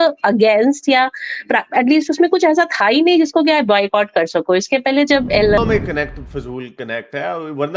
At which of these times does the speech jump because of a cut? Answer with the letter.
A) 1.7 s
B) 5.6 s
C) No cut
B